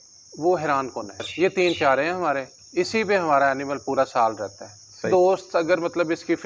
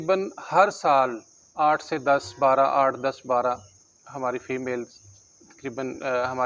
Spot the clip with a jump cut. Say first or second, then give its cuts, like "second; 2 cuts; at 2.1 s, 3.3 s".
first; 2 cuts; at 1.2 s, 5.1 s